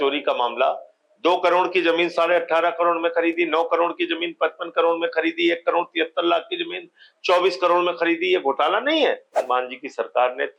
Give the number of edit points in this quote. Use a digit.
1